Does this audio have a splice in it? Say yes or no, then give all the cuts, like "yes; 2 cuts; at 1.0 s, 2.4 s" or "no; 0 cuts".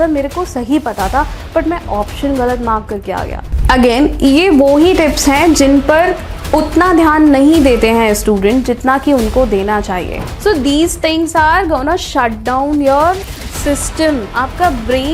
yes; 2 cuts; at 3.5 s, 10.3 s